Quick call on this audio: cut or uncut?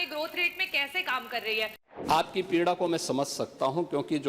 cut